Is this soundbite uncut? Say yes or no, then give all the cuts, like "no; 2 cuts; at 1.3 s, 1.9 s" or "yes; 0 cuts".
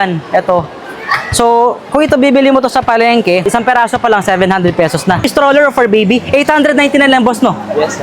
no; 2 cuts; at 3.5 s, 5.2 s